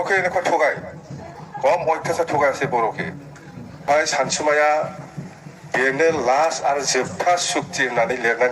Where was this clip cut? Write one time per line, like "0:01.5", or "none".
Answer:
0:03.9